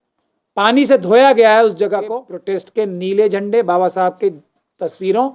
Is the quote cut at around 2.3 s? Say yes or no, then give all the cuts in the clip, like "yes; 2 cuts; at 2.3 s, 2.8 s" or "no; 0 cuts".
yes; 1 cut; at 2.3 s